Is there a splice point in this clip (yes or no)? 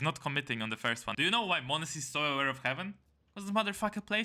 yes